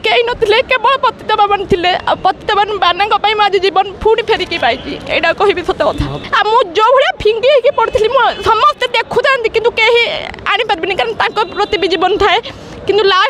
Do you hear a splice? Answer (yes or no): yes